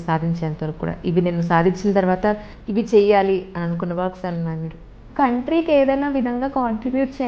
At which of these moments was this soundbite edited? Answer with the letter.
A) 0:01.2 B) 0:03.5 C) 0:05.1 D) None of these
C